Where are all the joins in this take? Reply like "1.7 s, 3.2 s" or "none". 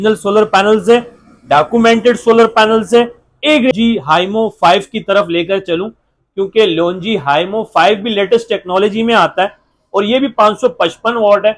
3.7 s